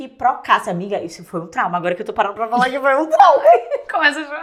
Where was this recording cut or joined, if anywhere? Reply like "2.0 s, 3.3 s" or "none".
none

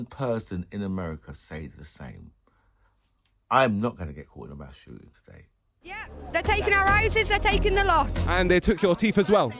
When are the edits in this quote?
6.1 s

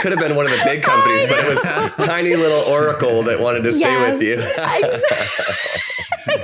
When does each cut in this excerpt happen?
none

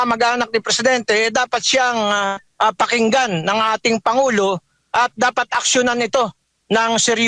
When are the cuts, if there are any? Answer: none

